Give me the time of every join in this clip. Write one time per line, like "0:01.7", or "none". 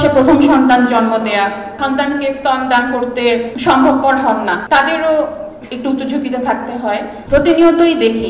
0:01.8
0:03.5
0:04.6
0:07.1